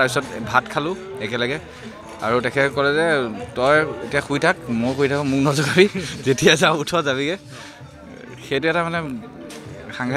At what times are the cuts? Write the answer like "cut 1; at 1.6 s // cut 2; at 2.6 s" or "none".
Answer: none